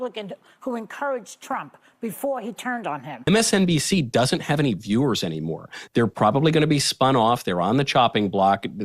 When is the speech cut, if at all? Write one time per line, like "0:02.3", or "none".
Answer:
0:03.3